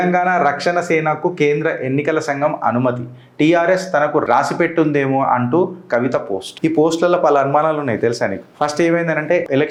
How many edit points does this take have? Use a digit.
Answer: 0